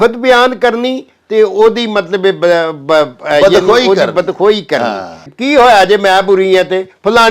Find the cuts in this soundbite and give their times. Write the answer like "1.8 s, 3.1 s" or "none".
5.3 s